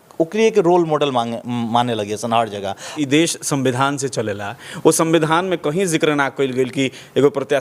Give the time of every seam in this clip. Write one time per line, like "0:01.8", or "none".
0:02.9